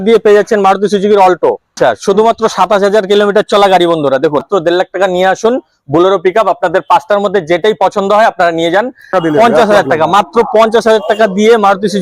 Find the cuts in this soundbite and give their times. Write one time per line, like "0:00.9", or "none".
0:01.8
0:04.5
0:09.1